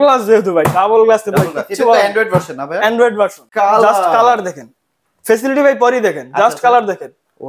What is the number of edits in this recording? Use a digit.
1